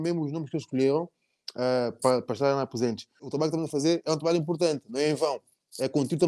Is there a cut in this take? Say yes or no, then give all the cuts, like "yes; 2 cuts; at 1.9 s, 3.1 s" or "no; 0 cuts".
yes; 1 cut; at 3.3 s